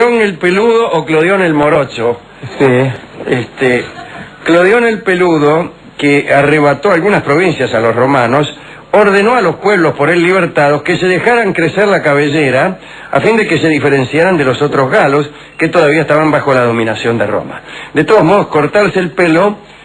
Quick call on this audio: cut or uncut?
uncut